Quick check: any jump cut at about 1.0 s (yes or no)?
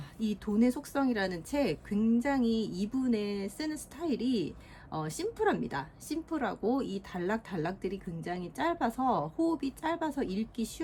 no